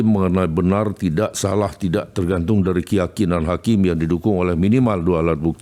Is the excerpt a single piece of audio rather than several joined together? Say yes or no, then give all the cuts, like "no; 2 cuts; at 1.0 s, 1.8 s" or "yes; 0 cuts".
yes; 0 cuts